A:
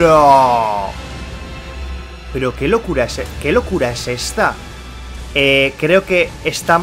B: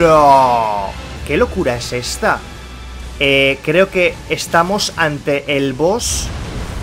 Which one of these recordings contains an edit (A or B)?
B